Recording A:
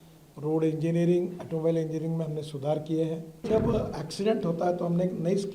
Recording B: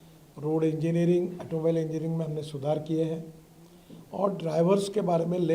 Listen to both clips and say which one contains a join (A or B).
A